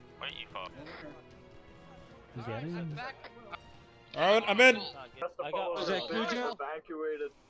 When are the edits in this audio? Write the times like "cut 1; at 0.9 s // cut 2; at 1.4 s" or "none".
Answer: cut 1; at 3.5 s // cut 2; at 5.2 s